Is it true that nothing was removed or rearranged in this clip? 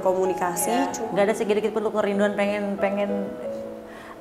no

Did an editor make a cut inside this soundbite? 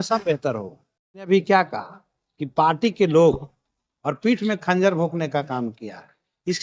yes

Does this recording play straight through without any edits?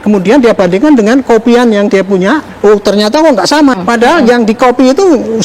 no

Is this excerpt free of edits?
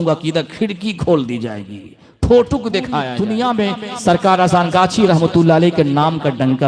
no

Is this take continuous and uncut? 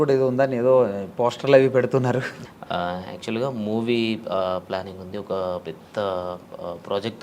no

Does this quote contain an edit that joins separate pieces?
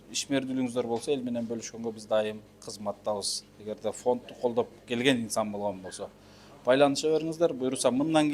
no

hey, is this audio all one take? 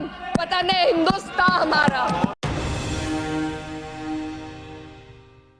yes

